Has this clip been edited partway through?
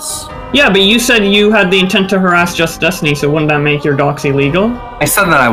no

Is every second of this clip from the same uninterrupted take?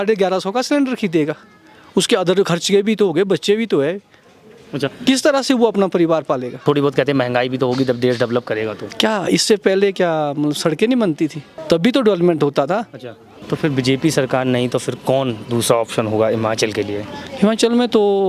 no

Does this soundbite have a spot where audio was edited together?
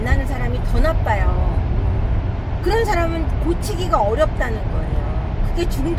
no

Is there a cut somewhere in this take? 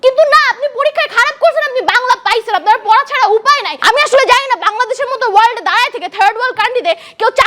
yes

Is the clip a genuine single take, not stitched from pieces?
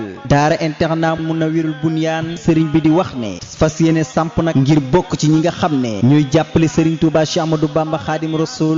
yes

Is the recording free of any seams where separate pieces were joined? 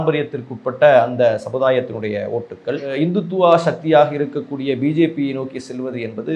yes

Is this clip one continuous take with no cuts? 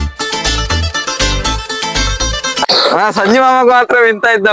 no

